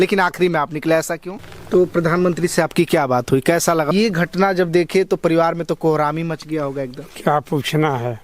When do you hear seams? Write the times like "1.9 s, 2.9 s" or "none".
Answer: 1.4 s, 3.9 s